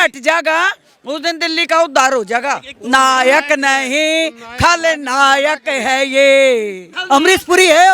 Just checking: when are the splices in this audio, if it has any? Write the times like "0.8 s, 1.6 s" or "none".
2.7 s, 6.9 s